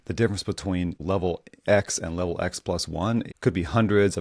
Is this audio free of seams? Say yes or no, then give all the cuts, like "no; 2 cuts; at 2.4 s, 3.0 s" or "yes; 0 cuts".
no; 2 cuts; at 1.0 s, 3.3 s